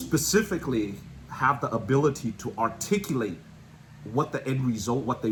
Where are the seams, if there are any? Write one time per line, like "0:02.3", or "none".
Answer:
none